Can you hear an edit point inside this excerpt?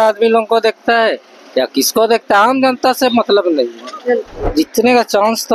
yes; 1 cut; at 4.4 s

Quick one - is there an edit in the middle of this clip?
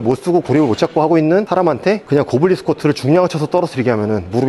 no; 0 cuts

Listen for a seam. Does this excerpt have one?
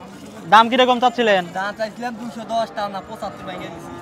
no; 0 cuts

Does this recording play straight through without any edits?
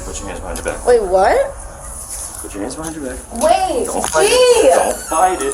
yes; 0 cuts

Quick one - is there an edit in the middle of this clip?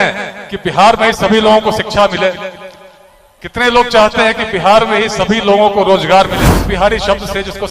yes; 1 cut; at 6.4 s

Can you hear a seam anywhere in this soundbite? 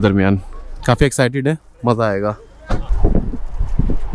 yes; 1 cut; at 2.9 s

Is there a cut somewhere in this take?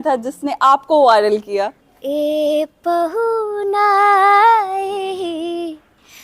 yes; 1 cut; at 1.8 s

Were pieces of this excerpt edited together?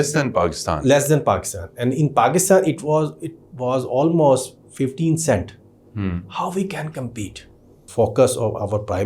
yes; 1 cut; at 7.8 s

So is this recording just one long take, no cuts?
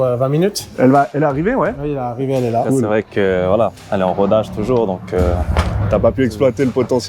no; 1 cut; at 2.9 s

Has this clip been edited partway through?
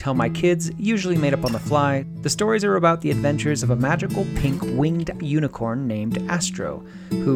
yes; 1 cut; at 2.1 s

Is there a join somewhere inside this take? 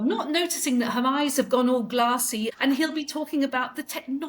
yes; 1 cut; at 2.5 s

